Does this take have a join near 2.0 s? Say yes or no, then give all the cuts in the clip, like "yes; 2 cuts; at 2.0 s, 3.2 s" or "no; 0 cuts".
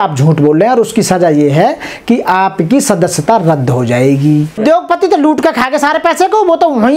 no; 1 cut; at 4.6 s